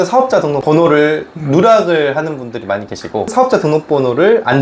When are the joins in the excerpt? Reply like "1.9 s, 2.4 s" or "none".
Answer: 3.3 s